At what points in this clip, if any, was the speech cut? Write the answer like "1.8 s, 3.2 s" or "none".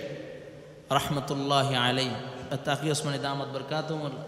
2.6 s

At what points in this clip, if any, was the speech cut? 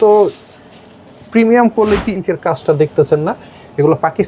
2.2 s

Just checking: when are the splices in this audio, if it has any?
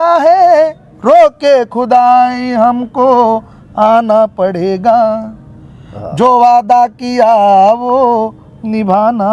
none

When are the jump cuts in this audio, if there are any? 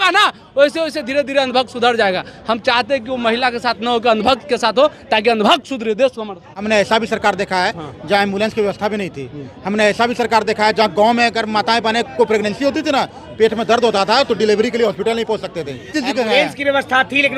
6.4 s, 15.9 s

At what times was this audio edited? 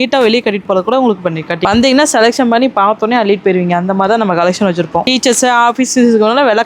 1.5 s, 5.1 s

